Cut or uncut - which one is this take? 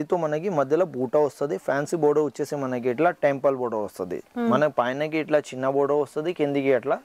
uncut